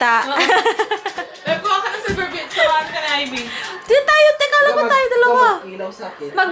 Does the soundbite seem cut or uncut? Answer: uncut